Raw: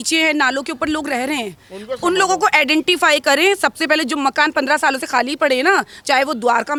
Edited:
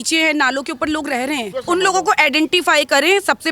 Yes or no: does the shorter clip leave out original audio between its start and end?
yes